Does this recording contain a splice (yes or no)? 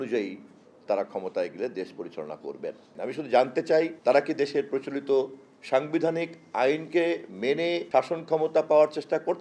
yes